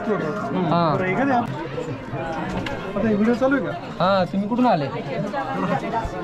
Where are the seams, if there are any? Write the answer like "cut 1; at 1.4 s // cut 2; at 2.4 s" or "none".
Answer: cut 1; at 1.4 s